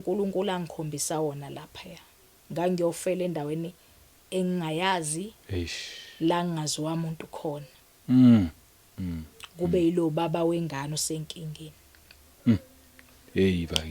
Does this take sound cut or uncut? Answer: uncut